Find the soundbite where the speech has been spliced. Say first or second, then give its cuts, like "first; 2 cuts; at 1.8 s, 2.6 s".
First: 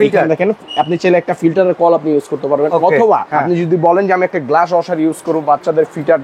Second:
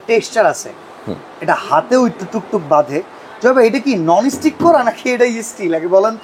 first; 1 cut; at 3.3 s